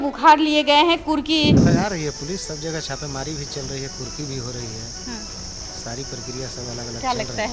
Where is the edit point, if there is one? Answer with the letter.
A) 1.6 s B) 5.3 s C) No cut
A